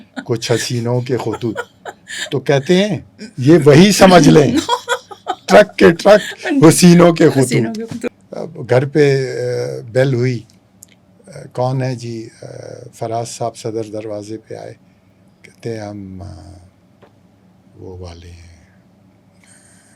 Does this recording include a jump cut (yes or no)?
yes